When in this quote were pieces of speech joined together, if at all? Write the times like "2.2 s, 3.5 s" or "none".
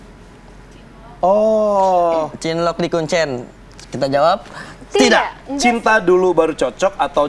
5.4 s